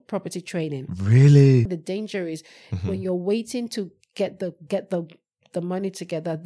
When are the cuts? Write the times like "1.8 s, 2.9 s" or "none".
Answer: 1.7 s